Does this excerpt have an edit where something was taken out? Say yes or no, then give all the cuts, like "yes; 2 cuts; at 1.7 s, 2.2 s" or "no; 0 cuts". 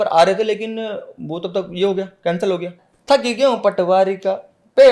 yes; 1 cut; at 2.9 s